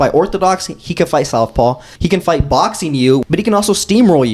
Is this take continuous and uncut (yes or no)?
no